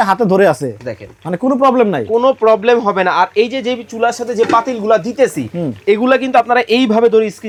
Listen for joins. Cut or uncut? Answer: uncut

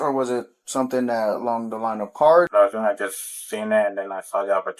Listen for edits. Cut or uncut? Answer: cut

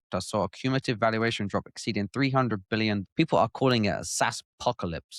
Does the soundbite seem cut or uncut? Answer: cut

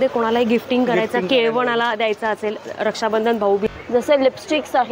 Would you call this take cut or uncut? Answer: cut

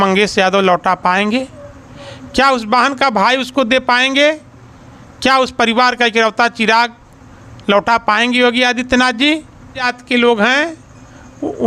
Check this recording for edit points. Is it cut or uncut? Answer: cut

